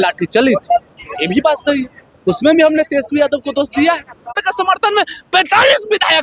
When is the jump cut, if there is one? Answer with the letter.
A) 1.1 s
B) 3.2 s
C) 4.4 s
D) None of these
C